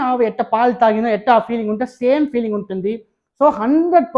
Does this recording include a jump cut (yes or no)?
no